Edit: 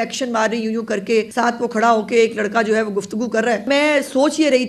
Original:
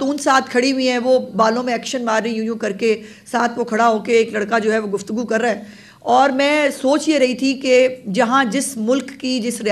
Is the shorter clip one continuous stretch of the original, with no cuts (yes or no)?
no